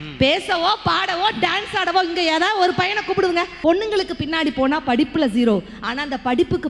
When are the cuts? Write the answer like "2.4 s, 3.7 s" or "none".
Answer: 3.5 s